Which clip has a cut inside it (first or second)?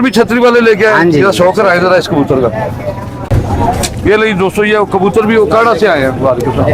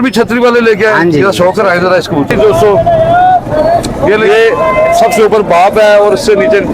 second